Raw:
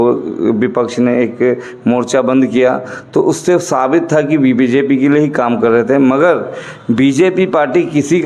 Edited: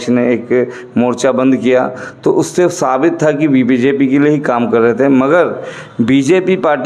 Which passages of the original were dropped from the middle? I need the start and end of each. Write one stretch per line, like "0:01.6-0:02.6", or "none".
none